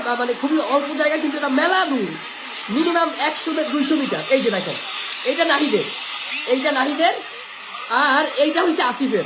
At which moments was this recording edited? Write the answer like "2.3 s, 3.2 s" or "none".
none